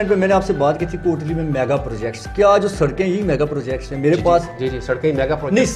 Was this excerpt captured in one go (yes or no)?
yes